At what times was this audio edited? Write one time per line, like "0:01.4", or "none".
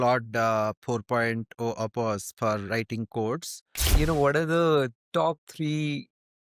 0:03.9